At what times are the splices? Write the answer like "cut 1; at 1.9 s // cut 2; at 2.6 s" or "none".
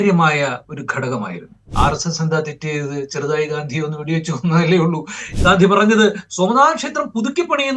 cut 1; at 1.7 s // cut 2; at 5.2 s